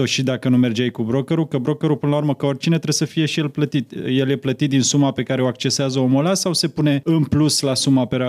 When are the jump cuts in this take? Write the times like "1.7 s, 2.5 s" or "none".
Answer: 7.0 s